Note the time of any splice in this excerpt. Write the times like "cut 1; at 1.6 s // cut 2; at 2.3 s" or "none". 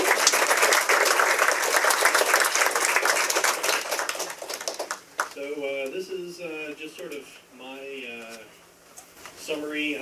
cut 1; at 1.4 s